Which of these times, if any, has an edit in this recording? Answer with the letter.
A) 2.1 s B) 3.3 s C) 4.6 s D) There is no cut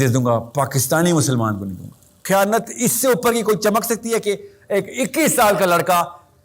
A